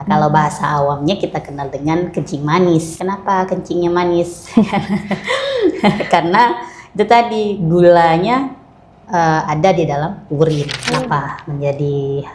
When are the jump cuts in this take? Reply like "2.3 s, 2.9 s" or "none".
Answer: 2.9 s, 10.8 s